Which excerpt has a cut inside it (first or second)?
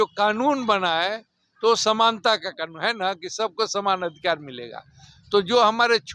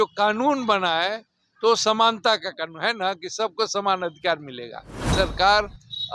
second